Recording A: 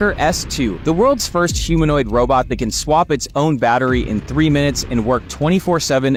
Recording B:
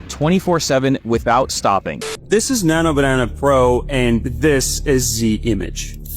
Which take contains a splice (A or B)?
B